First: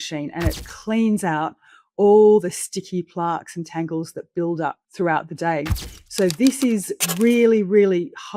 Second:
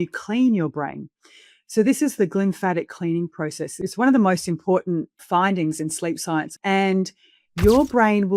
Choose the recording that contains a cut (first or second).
second